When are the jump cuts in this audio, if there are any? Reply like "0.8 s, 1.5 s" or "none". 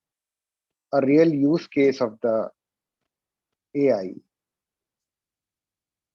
none